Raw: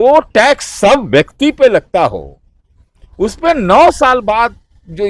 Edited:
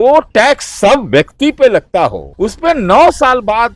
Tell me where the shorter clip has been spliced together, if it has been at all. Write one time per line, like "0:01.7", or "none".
0:02.2

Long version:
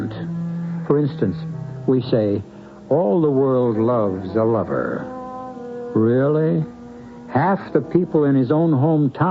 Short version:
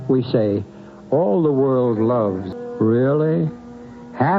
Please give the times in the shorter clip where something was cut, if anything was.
0:02.4

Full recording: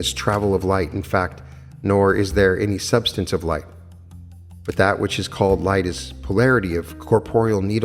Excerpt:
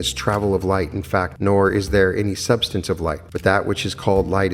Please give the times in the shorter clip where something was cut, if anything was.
0:01.3
0:03.3

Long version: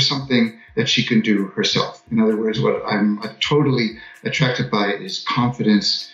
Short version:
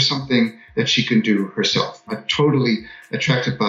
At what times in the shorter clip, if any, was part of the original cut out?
0:02.1

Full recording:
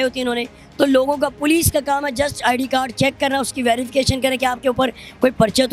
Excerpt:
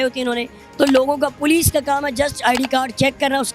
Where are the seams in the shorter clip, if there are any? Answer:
none

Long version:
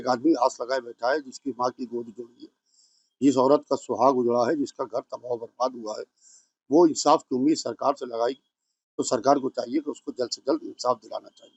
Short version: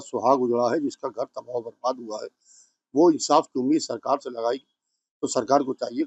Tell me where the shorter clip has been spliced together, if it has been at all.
none

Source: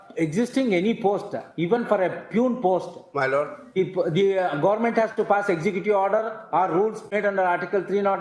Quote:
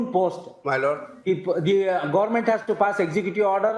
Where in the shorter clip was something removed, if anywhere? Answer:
none

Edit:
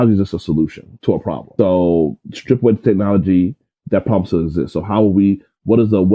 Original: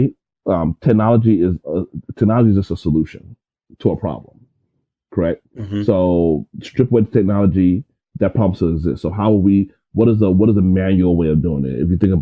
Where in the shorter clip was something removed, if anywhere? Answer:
0:01.3

